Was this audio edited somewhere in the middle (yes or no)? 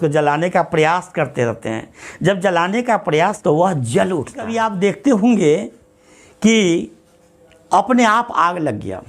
yes